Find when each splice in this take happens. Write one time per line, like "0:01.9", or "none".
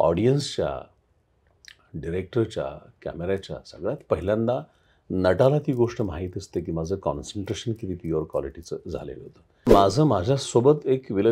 0:09.7